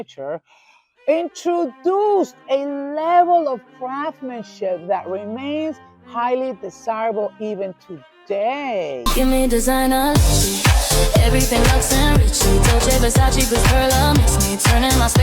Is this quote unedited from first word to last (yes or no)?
no